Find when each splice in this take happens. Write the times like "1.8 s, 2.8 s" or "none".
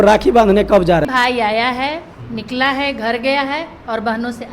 1.1 s